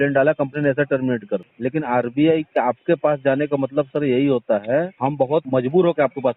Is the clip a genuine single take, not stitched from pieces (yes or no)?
no